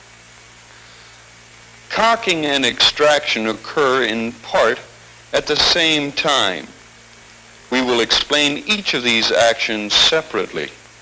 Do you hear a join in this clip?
no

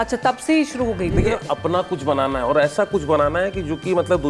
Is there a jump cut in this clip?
yes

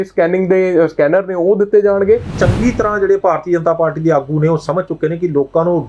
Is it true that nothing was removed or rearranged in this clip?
no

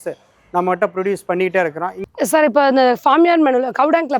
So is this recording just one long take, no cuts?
no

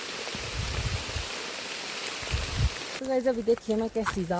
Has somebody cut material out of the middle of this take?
yes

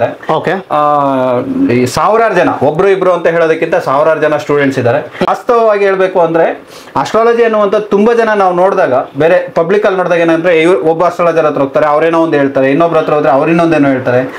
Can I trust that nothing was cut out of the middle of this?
no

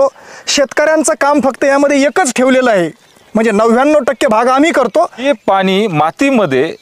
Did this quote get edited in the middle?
yes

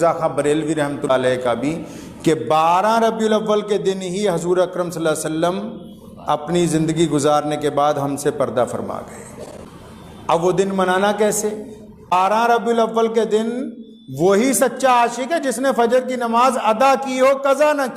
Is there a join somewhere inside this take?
yes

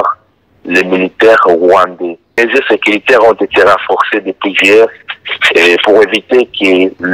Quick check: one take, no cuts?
no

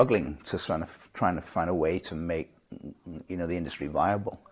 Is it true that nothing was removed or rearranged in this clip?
yes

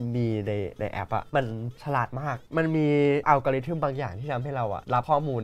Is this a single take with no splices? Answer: yes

